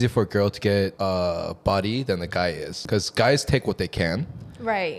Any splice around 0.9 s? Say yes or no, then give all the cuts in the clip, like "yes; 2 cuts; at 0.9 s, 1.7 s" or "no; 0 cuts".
yes; 2 cuts; at 0.9 s, 2.8 s